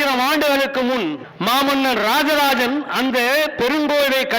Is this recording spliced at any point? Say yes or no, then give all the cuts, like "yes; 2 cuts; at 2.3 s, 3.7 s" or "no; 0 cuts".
yes; 1 cut; at 1.3 s